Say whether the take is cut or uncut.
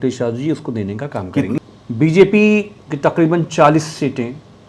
cut